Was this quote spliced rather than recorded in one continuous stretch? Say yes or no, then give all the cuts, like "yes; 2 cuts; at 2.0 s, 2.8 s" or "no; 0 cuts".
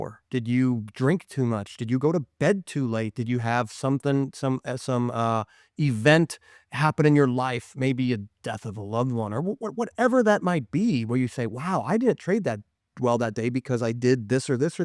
no; 0 cuts